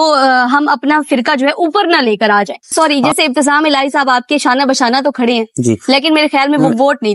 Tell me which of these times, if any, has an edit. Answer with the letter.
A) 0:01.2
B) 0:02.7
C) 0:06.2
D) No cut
B